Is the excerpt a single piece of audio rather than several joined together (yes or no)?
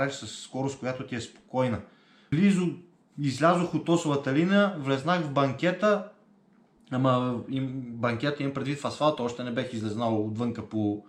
no